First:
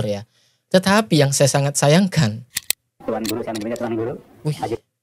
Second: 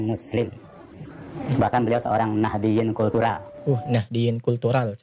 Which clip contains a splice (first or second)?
first